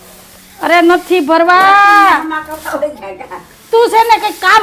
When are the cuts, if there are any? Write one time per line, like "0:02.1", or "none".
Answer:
none